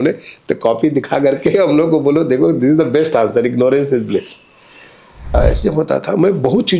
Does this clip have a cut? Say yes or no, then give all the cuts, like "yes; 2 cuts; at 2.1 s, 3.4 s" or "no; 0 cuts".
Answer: yes; 1 cut; at 5.4 s